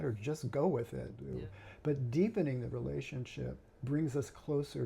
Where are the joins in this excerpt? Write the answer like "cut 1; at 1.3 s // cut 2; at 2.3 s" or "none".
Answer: cut 1; at 1.1 s